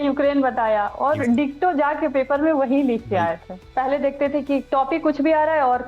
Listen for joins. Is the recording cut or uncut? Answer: cut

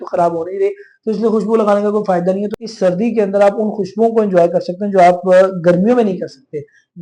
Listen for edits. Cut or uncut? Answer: cut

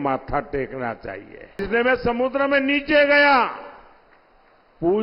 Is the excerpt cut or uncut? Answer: cut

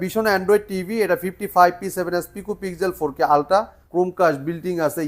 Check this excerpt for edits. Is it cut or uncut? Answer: cut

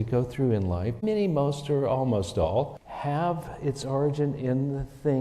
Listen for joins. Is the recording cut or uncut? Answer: cut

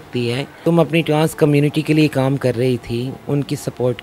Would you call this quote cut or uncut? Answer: uncut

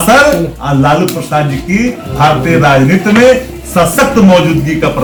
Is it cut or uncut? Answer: uncut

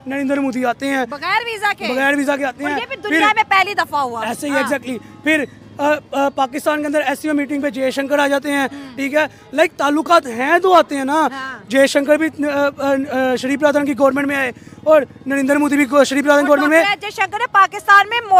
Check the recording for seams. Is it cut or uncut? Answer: uncut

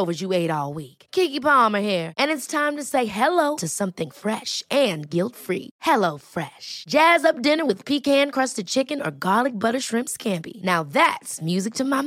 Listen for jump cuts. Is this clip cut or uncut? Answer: uncut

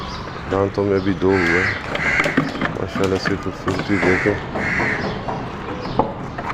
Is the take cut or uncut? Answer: uncut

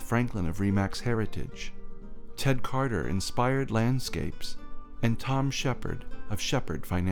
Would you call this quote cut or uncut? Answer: uncut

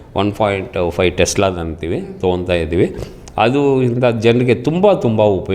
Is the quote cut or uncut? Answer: uncut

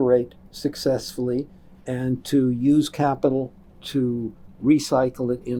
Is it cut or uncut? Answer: uncut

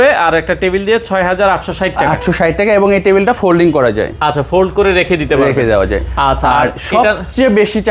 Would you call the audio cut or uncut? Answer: uncut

